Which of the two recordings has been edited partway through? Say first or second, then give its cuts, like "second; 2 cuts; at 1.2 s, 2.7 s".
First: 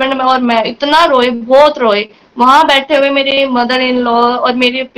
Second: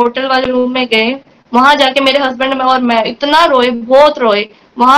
second; 1 cut; at 1.3 s